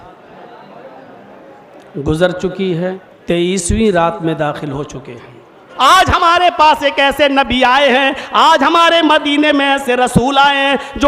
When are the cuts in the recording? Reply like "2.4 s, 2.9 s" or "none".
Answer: 3.1 s, 5.7 s